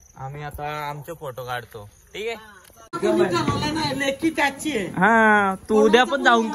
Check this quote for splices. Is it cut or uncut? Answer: cut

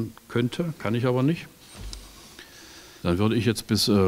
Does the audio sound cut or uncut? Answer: cut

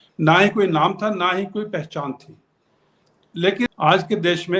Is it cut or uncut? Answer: cut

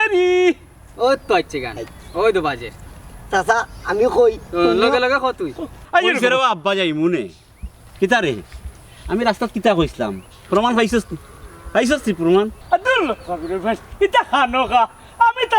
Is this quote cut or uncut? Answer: cut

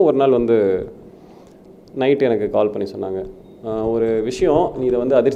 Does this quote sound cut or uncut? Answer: uncut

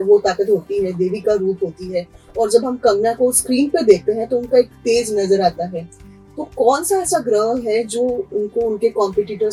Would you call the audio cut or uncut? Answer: uncut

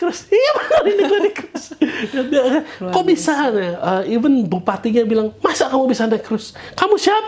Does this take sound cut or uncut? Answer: uncut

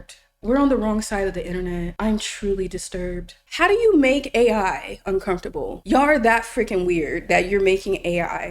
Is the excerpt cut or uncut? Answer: cut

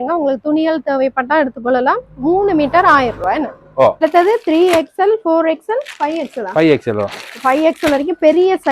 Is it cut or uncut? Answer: cut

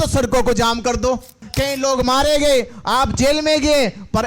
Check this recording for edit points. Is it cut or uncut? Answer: cut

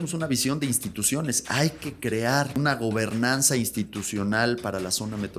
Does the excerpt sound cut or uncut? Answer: cut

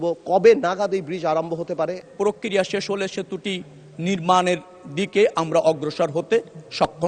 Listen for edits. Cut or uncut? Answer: cut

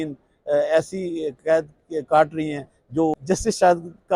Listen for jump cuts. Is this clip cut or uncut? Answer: cut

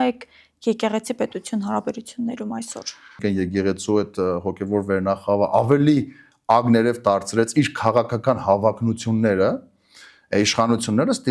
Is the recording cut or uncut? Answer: cut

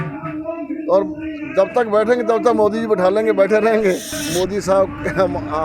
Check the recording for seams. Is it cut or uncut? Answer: cut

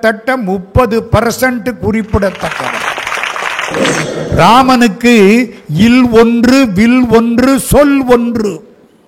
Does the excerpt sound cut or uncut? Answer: cut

